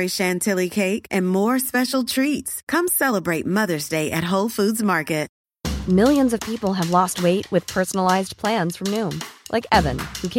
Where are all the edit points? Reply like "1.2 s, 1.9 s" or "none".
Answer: 5.3 s